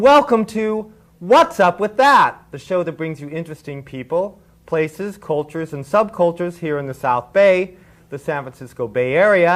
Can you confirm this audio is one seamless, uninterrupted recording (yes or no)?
no